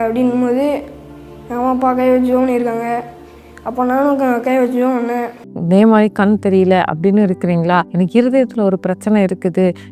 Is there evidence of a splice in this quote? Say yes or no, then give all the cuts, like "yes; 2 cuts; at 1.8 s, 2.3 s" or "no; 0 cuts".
yes; 2 cuts; at 5.4 s, 7.9 s